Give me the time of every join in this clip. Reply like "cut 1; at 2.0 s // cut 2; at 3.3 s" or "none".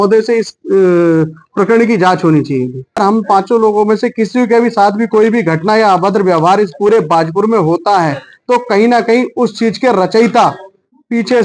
cut 1; at 3.0 s